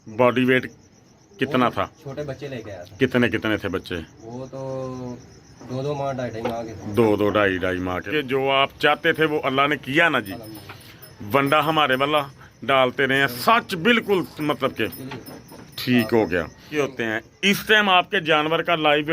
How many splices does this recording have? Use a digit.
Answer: 2